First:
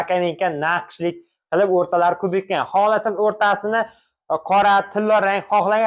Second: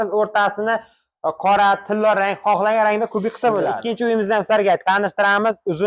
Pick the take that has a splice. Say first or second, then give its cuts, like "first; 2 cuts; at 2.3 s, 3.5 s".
second; 1 cut; at 3.8 s